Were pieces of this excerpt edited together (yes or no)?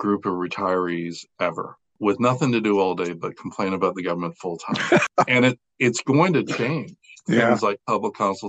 yes